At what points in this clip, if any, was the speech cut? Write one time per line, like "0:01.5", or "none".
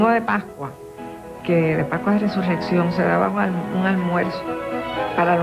0:03.5